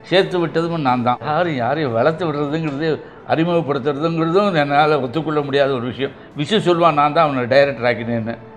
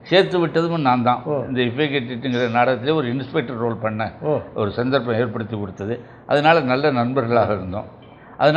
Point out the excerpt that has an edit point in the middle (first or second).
first